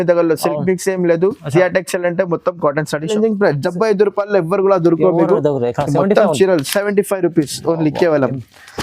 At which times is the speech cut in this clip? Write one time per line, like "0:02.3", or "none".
0:03.1